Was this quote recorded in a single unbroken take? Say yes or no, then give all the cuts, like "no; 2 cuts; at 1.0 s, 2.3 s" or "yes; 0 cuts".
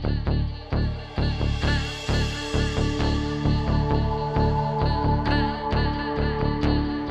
yes; 0 cuts